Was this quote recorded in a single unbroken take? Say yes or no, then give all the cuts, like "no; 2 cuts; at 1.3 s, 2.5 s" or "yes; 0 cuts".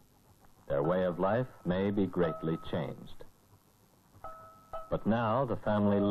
no; 1 cut; at 2.3 s